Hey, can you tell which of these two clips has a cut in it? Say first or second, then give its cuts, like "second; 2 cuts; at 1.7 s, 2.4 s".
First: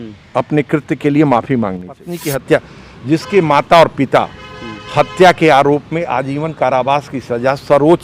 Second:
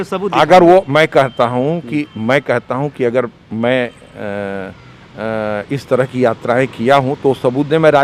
first; 1 cut; at 2.2 s